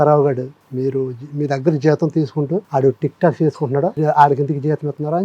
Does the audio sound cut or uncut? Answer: cut